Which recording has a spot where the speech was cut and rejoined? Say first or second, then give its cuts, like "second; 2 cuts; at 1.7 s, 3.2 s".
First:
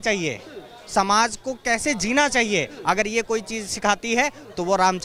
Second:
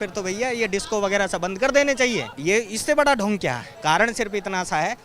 second; 2 cuts; at 2.3 s, 3.7 s